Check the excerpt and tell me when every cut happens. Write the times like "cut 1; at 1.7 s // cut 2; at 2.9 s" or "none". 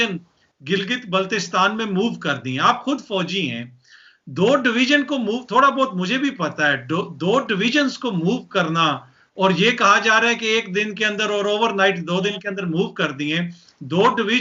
none